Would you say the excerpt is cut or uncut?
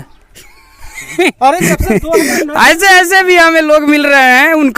uncut